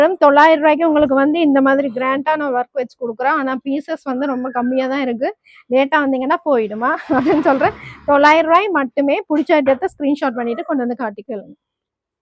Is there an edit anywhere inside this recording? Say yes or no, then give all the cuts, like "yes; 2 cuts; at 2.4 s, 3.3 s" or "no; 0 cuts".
no; 0 cuts